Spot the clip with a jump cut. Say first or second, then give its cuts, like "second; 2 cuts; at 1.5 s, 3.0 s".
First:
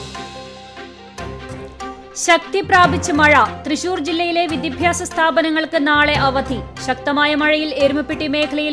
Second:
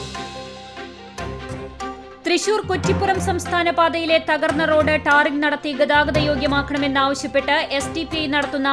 first; 1 cut; at 2.1 s